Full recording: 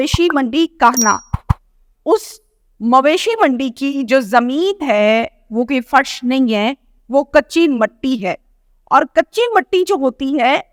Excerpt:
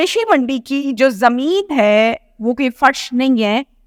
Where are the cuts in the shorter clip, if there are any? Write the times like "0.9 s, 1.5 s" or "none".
none